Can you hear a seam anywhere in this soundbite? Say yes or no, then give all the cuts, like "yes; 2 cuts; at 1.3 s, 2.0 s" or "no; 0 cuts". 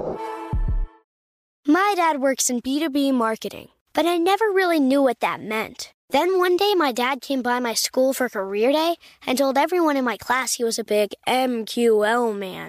yes; 1 cut; at 1.2 s